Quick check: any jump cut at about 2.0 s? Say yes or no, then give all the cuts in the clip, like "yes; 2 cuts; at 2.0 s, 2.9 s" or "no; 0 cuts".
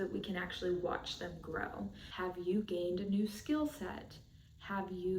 yes; 1 cut; at 2.0 s